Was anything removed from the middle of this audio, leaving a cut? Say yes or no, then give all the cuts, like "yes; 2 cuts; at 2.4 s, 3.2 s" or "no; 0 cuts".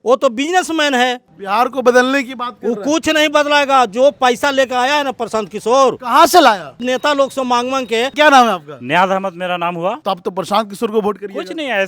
yes; 4 cuts; at 1.3 s, 6.8 s, 8.1 s, 10.0 s